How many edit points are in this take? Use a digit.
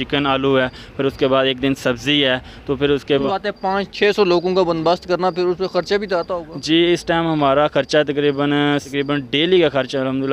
2